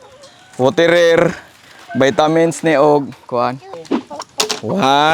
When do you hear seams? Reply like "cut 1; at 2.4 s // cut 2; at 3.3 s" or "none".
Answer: cut 1; at 3.7 s